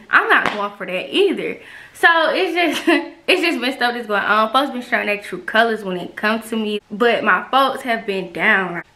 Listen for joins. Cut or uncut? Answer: uncut